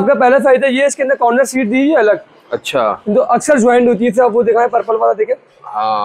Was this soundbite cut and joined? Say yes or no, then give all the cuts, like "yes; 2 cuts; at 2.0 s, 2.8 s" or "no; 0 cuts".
no; 0 cuts